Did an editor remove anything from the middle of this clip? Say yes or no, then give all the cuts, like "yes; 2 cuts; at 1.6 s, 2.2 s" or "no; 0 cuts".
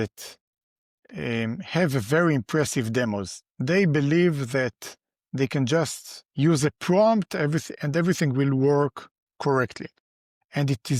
no; 0 cuts